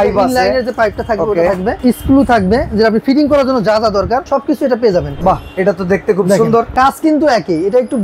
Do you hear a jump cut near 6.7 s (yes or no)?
yes